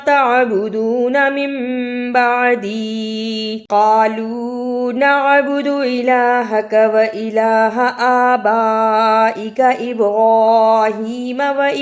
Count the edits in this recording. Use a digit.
1